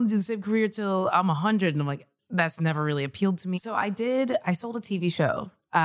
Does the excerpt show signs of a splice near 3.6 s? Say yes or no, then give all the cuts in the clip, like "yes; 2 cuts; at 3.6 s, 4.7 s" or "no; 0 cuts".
yes; 1 cut; at 3.6 s